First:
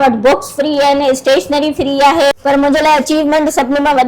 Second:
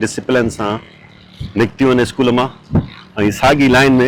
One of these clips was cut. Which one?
first; 1 cut; at 2.4 s

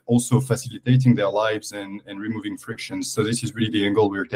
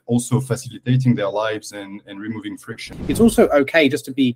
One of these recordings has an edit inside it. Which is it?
second; 1 cut; at 2.9 s

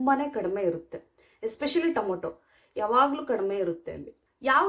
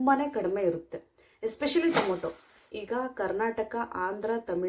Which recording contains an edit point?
second; 1 cut; at 2.7 s

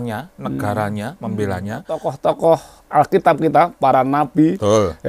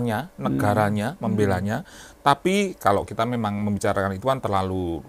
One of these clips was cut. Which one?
first; 1 cut; at 2.1 s

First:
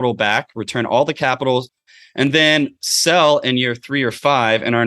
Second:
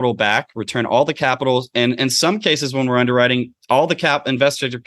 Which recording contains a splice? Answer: first; 1 cut; at 1.7 s

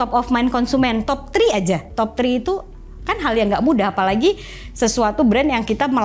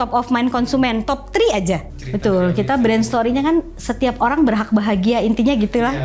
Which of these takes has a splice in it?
second; 1 cut; at 1.9 s

